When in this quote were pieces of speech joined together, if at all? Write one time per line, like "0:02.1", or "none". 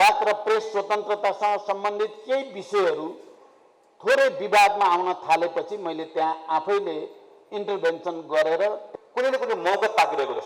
0:08.8